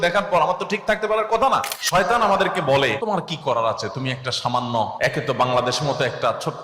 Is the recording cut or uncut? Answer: cut